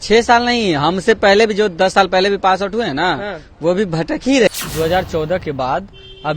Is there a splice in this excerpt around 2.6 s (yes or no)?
no